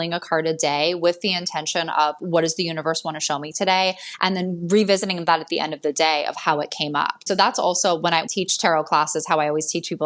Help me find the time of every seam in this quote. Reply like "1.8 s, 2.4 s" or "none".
7.2 s, 8.3 s

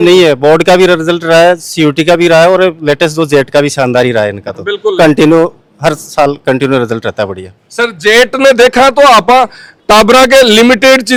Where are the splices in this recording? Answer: none

